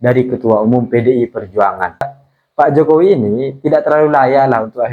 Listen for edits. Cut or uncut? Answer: cut